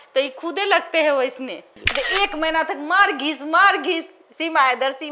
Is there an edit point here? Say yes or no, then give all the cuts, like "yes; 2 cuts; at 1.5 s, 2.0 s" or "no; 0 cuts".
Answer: yes; 1 cut; at 1.8 s